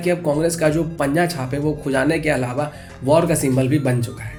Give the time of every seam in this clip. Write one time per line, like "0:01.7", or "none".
none